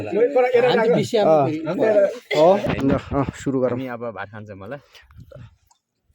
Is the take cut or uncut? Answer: cut